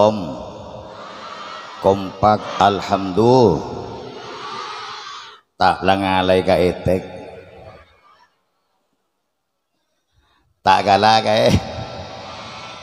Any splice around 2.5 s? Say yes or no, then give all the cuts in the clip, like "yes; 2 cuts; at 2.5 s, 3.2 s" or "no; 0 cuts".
yes; 1 cut; at 2.5 s